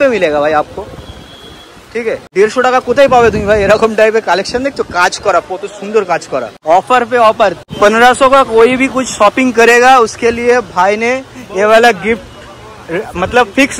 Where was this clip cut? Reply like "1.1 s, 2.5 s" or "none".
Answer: 2.2 s, 6.5 s, 7.7 s